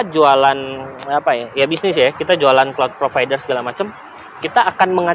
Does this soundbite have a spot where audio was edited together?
no; 0 cuts

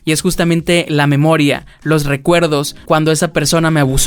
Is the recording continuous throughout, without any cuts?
no; 1 cut; at 2.7 s

